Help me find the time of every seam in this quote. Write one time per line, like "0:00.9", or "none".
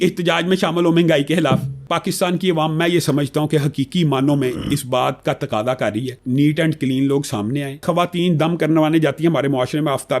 0:01.9
0:06.1
0:07.8